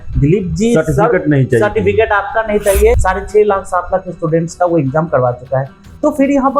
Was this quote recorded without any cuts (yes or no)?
no